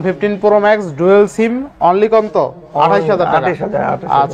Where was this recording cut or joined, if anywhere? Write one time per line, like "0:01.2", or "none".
none

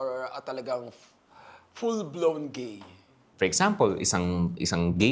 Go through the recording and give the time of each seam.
0:03.2

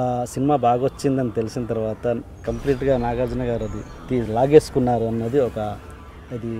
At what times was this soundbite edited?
none

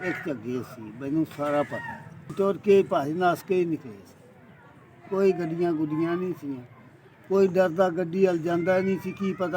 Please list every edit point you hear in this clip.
0:02.3

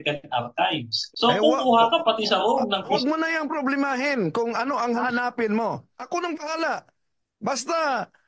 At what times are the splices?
0:01.0
0:02.9
0:05.0
0:05.9

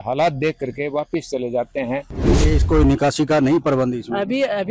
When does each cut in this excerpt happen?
0:02.1

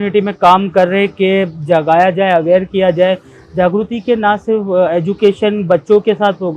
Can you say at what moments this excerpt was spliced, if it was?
none

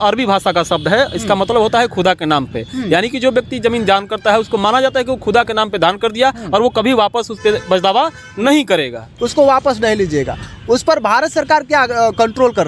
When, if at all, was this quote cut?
0:09.1

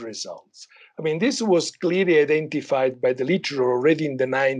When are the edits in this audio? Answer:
none

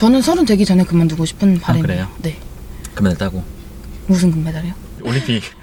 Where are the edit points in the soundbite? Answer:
none

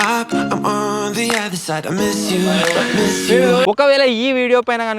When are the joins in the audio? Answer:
0:03.7

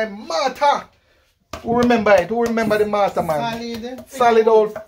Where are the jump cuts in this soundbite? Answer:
none

